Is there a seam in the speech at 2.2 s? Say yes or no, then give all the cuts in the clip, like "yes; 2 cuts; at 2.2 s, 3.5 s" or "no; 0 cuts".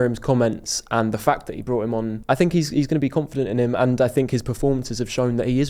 yes; 1 cut; at 2.2 s